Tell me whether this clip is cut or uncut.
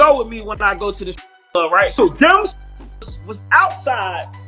cut